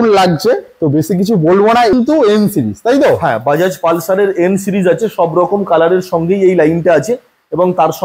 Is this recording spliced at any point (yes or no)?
yes